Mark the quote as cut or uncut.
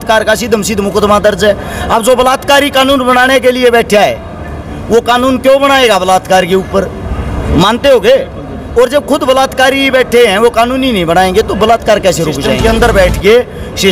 cut